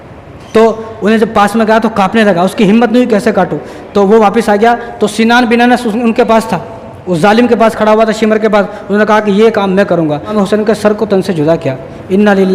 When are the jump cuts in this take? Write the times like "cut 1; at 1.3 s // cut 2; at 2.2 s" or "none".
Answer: cut 1; at 10.3 s

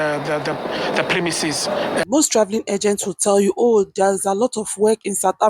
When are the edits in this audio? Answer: cut 1; at 2.0 s

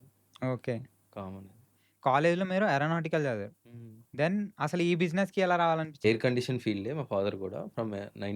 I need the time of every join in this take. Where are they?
cut 1; at 1.8 s // cut 2; at 5.9 s

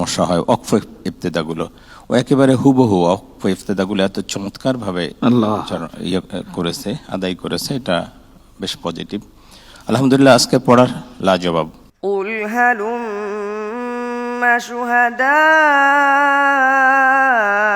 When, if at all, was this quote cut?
cut 1; at 11.8 s

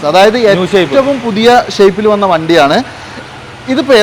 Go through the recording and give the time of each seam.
none

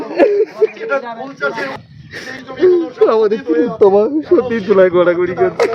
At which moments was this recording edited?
cut 1; at 1.7 s

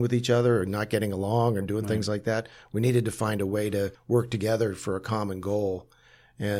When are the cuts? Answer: cut 1; at 4.0 s

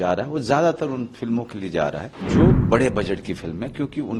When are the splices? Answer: cut 1; at 2.1 s

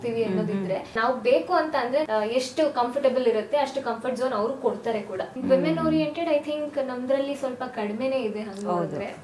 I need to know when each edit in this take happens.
cut 1; at 1.0 s // cut 2; at 2.1 s // cut 3; at 5.3 s

